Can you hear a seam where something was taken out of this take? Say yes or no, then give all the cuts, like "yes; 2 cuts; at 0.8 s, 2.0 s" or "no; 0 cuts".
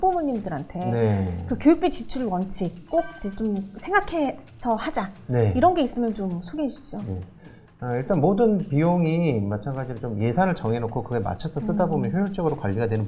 no; 0 cuts